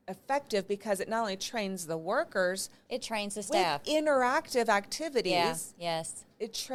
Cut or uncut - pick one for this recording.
uncut